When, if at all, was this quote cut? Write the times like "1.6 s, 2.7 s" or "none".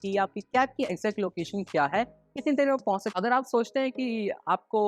3.1 s